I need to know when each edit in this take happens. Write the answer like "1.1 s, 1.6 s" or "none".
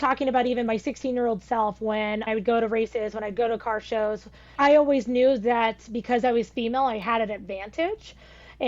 2.3 s, 4.5 s